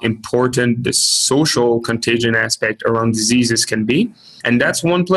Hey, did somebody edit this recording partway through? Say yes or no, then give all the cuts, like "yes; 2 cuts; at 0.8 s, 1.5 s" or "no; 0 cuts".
yes; 1 cut; at 4.3 s